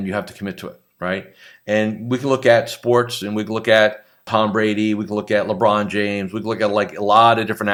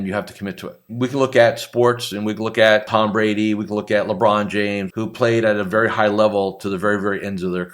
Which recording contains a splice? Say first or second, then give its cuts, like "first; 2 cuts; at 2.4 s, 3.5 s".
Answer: second; 3 cuts; at 0.9 s, 2.9 s, 4.9 s